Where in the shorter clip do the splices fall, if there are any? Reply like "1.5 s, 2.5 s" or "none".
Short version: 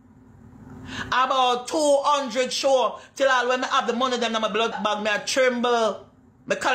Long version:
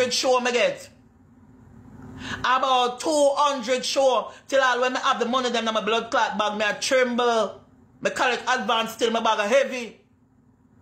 4.8 s